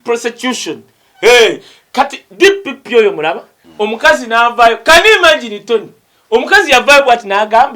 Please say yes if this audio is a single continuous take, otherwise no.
yes